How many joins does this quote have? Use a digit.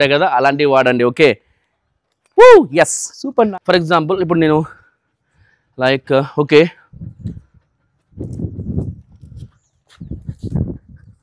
1